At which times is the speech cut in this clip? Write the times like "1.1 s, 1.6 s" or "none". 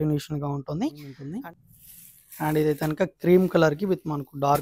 1.2 s